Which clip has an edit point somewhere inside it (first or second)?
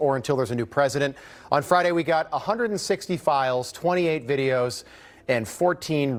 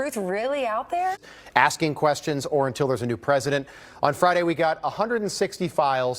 second